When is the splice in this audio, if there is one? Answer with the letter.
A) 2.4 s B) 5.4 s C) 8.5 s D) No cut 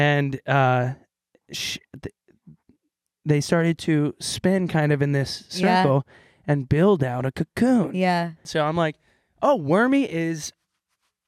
C